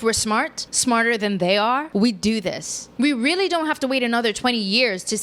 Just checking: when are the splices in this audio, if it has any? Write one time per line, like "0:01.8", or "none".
none